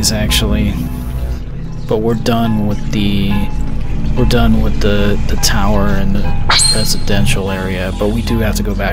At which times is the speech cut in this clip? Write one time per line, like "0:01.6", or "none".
none